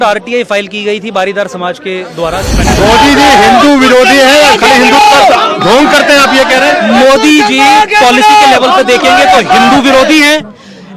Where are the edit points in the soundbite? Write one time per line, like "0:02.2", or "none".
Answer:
0:02.7